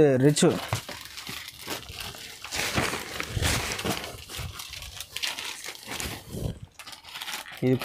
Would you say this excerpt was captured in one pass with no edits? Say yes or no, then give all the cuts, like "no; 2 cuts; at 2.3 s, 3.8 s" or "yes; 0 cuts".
yes; 0 cuts